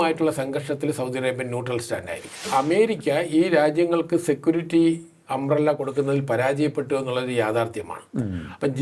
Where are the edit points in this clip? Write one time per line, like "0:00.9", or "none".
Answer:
0:02.4